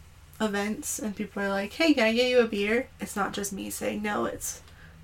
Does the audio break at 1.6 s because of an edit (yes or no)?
no